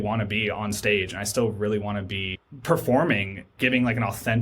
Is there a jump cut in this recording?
yes; 1 cut; at 3.5 s

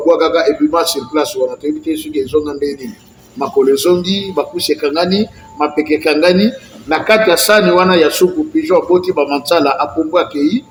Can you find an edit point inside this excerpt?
no; 0 cuts

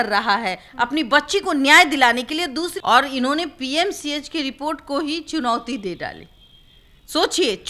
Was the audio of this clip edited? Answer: yes; 1 cut; at 2.8 s

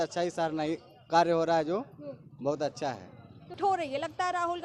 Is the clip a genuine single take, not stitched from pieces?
no; 1 cut; at 3.6 s

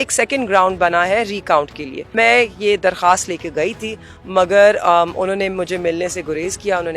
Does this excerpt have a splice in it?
yes; 1 cut; at 2.1 s

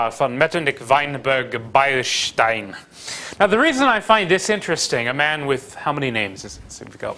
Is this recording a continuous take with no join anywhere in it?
yes; 0 cuts

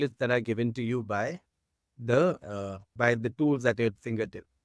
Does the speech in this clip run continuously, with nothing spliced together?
no; 1 cut; at 3.2 s

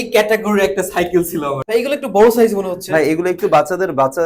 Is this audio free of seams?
no; 1 cut; at 1.6 s

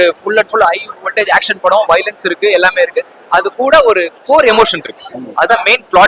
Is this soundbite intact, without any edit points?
yes; 0 cuts

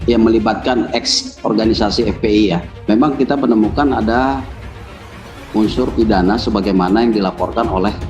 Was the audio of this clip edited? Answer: yes; 1 cut; at 2.9 s

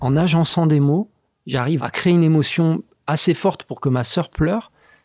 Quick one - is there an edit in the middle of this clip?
yes; 1 cut; at 1.8 s

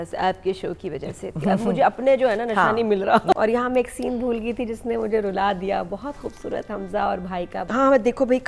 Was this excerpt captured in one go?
no; 2 cuts; at 3.4 s, 7.7 s

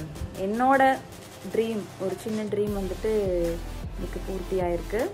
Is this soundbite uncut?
yes; 0 cuts

